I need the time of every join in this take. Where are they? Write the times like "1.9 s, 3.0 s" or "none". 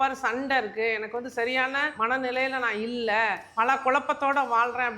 1.9 s, 3.4 s